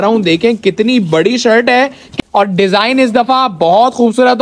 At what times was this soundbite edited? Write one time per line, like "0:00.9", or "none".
0:02.1